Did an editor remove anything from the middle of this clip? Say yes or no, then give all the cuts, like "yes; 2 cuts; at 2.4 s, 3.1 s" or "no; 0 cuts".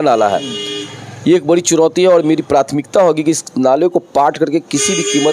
no; 0 cuts